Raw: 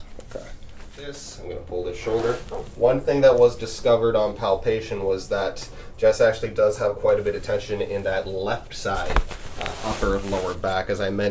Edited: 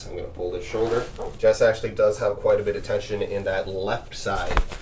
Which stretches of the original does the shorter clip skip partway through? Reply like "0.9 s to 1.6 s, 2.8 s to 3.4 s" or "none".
2.5 s to 5.8 s